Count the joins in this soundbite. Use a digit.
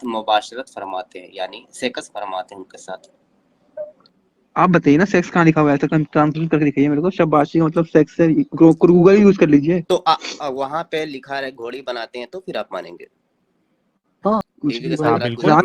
2